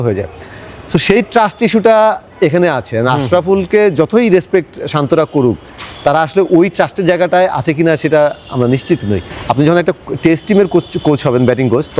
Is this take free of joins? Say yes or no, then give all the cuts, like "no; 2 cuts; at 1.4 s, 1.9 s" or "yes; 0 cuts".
no; 1 cut; at 9.3 s